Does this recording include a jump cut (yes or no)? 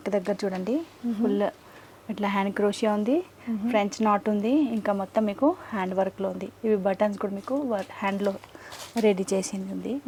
no